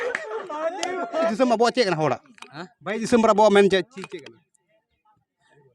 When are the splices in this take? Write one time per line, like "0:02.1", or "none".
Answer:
0:01.3

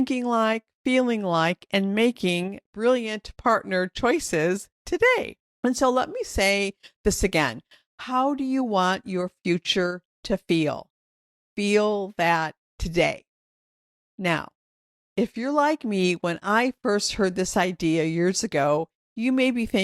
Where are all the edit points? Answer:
0:02.6
0:05.4

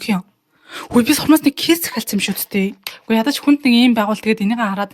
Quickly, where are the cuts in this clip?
0:02.8

